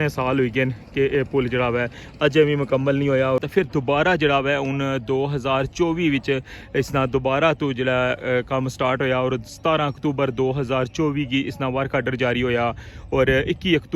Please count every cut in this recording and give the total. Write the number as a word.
one